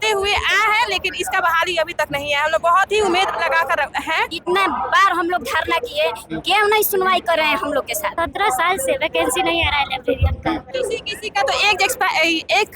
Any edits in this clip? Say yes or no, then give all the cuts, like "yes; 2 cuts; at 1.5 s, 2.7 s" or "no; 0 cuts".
yes; 3 cuts; at 4.3 s, 8.1 s, 10.7 s